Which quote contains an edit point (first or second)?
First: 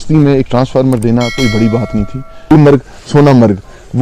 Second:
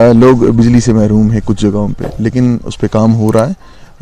first